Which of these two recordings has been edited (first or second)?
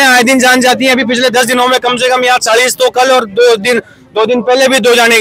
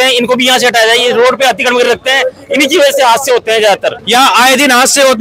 second